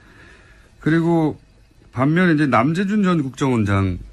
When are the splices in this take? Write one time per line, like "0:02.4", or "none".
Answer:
none